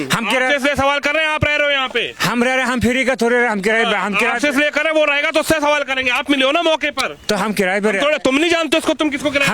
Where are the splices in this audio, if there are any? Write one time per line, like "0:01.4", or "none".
none